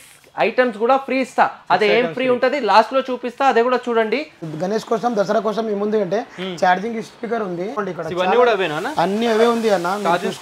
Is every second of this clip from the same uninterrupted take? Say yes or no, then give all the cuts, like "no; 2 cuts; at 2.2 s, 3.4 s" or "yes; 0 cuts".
no; 2 cuts; at 4.4 s, 7.8 s